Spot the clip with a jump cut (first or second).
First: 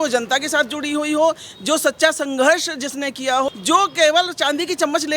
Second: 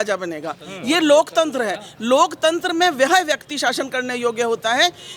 first